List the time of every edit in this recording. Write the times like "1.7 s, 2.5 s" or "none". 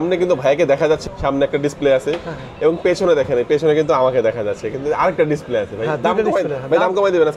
1.0 s